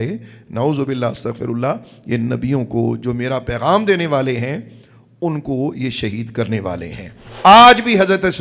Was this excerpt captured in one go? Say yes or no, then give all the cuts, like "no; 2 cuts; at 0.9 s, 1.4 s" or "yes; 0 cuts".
no; 1 cut; at 7.2 s